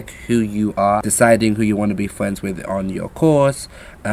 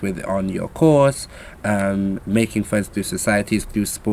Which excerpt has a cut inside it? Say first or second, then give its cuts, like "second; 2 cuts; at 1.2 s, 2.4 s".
first; 1 cut; at 1.0 s